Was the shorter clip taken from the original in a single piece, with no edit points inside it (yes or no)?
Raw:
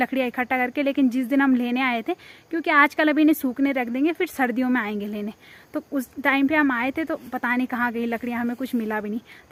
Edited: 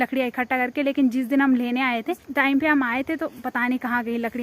no